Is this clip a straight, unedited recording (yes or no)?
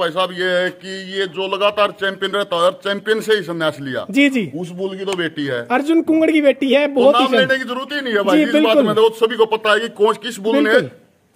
yes